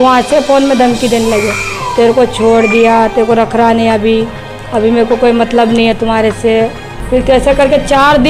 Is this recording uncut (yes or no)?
no